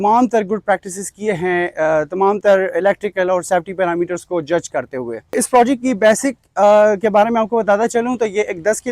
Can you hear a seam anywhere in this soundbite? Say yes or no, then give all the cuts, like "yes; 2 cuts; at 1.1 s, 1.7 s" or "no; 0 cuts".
no; 0 cuts